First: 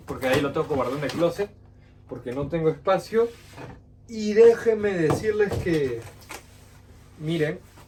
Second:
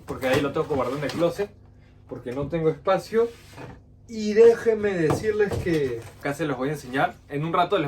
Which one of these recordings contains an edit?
second; 1 cut; at 6.1 s

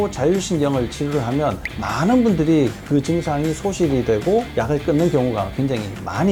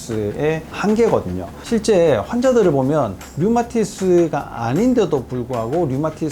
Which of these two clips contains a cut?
second; 1 cut; at 1.5 s

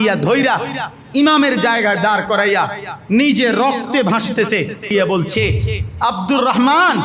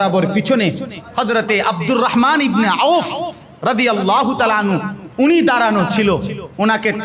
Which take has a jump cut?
first; 1 cut; at 4.9 s

